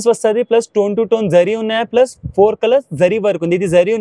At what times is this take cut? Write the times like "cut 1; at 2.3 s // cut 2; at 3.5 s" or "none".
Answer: none